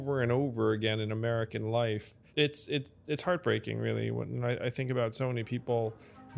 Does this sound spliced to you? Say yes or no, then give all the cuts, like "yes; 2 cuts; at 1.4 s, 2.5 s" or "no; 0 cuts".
yes; 1 cut; at 2.2 s